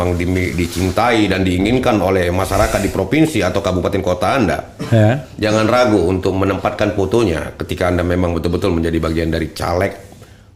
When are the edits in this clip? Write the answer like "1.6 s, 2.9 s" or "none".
none

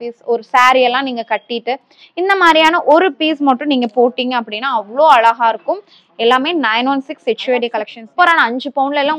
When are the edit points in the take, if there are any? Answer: 7.7 s

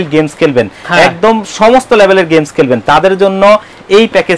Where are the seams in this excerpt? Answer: none

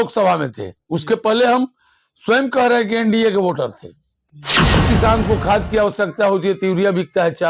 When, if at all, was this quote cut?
4.8 s

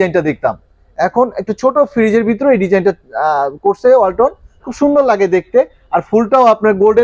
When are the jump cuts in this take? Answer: none

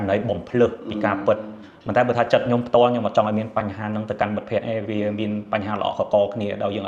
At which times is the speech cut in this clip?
none

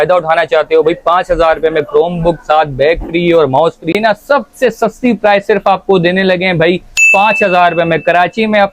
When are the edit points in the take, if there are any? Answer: 3.9 s

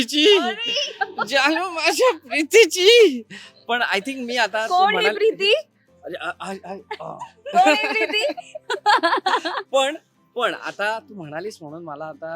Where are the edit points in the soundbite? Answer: none

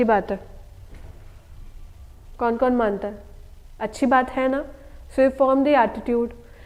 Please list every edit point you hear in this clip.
none

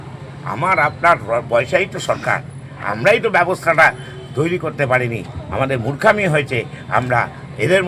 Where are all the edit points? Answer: none

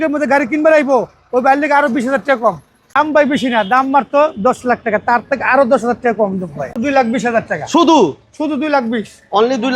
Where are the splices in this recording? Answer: 2.9 s, 6.7 s

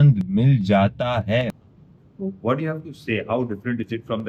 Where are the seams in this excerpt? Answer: 1.5 s

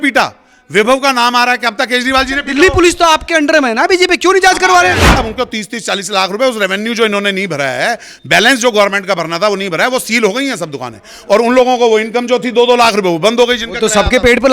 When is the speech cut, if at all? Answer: 5.1 s

